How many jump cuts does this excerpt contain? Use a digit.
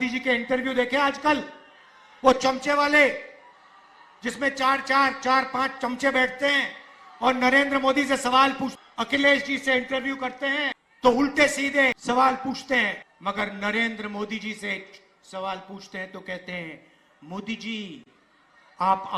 4